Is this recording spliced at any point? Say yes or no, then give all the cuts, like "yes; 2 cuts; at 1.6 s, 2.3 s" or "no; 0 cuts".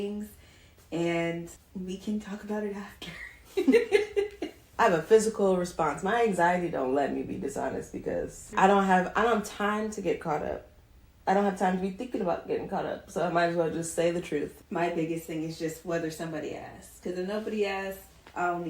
yes; 4 cuts; at 1.6 s, 4.6 s, 8.4 s, 14.6 s